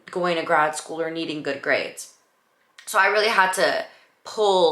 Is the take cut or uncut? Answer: uncut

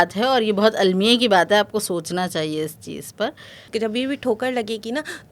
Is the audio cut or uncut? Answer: cut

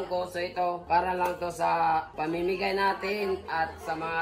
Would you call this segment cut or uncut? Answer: cut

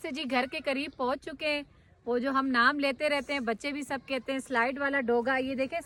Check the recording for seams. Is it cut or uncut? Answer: uncut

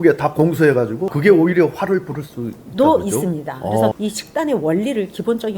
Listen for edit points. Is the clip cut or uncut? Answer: cut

